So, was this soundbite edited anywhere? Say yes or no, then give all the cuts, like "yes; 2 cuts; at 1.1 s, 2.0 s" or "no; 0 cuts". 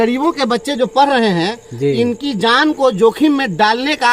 no; 0 cuts